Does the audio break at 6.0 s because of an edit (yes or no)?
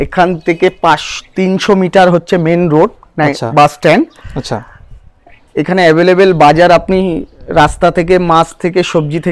no